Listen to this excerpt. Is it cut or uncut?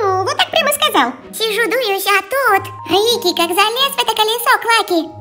cut